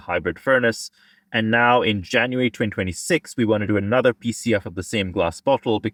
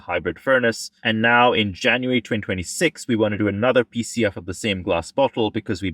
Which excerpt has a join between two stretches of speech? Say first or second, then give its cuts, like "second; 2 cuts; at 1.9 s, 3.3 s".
second; 1 cut; at 0.9 s